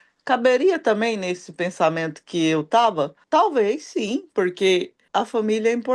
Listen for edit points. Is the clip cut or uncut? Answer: cut